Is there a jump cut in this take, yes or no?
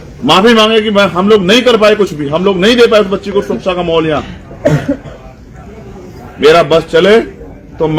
no